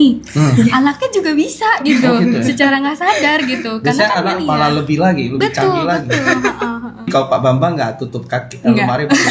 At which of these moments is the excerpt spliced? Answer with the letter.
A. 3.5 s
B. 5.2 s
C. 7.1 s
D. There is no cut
C